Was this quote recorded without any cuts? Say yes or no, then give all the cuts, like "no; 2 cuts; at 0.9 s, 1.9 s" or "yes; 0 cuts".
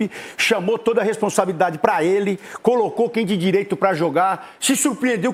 yes; 0 cuts